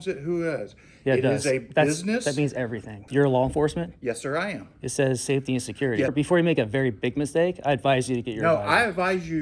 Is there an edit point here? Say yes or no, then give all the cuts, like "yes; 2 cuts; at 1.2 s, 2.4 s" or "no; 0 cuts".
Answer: yes; 2 cuts; at 3.0 s, 6.1 s